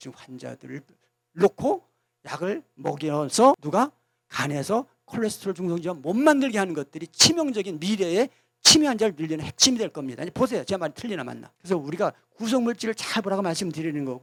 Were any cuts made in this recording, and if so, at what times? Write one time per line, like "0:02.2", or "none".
none